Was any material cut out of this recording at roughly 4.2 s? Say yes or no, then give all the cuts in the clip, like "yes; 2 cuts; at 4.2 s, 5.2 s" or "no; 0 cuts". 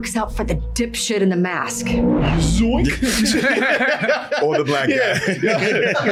no; 0 cuts